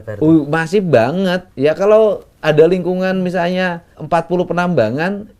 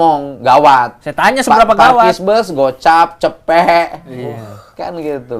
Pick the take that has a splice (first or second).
first